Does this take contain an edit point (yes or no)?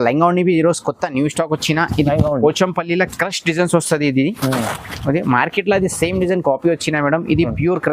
no